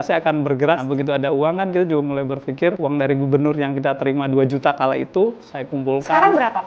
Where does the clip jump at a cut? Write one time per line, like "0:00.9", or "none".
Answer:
0:00.8
0:02.8